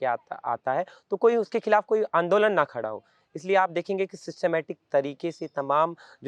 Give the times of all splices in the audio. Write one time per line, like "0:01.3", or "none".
none